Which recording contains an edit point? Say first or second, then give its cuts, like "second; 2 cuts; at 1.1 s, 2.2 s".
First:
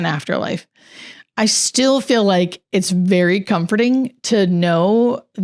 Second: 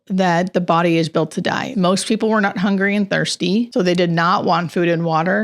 second; 2 cuts; at 1.7 s, 3.7 s